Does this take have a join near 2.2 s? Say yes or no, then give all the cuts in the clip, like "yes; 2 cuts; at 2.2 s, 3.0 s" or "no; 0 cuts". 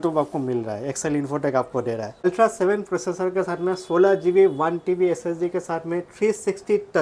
yes; 1 cut; at 2.2 s